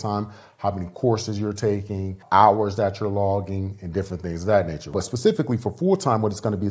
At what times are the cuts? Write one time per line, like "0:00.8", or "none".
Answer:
0:02.2
0:04.9